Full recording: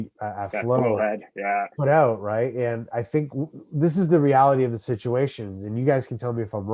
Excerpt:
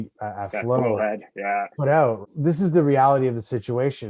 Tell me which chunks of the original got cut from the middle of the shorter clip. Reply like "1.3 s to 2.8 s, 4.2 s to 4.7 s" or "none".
2.2 s to 3.6 s